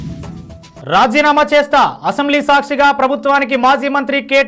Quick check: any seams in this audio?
yes; 1 cut; at 1.0 s

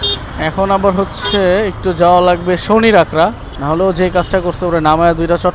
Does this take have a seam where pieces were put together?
yes; 1 cut; at 3.5 s

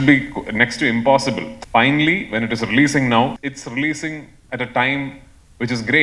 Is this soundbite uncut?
no; 2 cuts; at 1.5 s, 3.5 s

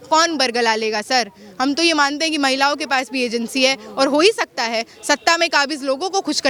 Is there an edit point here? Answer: no; 0 cuts

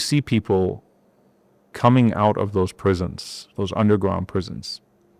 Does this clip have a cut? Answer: no; 0 cuts

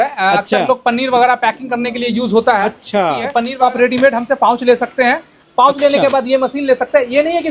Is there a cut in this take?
yes; 1 cut; at 3.5 s

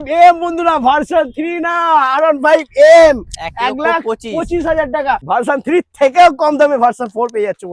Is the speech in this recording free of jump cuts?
no; 1 cut; at 5.2 s

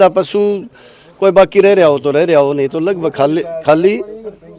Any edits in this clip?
no; 0 cuts

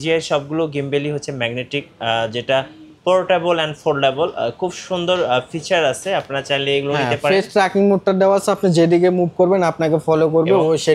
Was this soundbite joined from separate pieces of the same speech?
no; 0 cuts

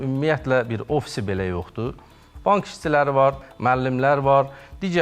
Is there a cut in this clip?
yes; 1 cut; at 3.4 s

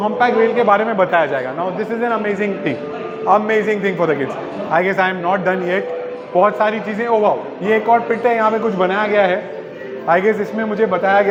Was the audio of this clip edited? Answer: no; 0 cuts

